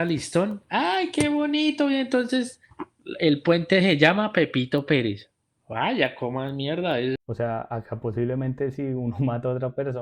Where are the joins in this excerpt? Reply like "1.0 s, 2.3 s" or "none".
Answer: 7.2 s